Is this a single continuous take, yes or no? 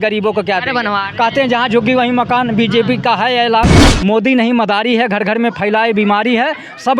no